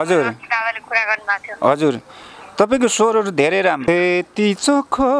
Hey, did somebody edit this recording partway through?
yes; 1 cut; at 3.9 s

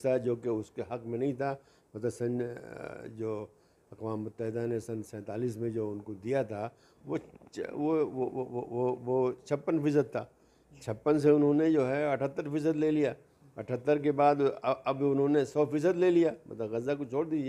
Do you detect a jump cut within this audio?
no; 0 cuts

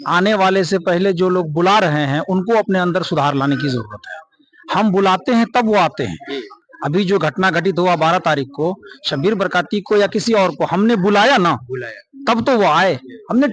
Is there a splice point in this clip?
no; 0 cuts

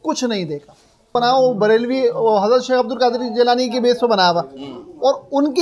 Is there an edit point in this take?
yes; 1 cut; at 1.1 s

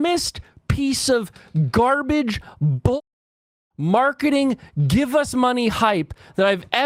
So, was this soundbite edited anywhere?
no; 0 cuts

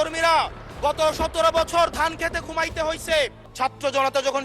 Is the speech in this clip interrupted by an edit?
yes; 1 cut; at 3.4 s

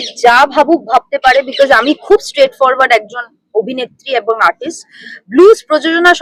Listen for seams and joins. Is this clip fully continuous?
yes; 0 cuts

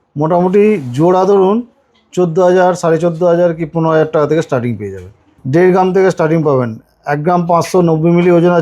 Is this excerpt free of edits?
no; 1 cut; at 5.3 s

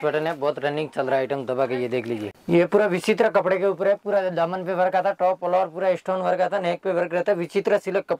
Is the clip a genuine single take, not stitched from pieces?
no; 1 cut; at 2.3 s

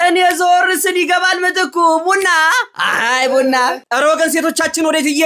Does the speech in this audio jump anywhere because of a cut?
yes; 1 cut; at 3.8 s

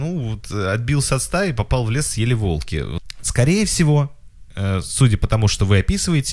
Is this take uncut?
no; 1 cut; at 3.0 s

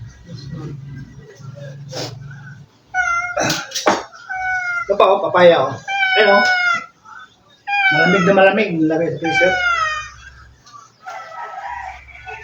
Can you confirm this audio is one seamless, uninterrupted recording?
yes; 0 cuts

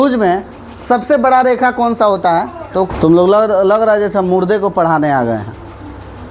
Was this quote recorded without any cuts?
no; 1 cut; at 2.9 s

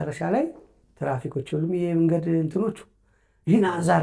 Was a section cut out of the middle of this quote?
no; 0 cuts

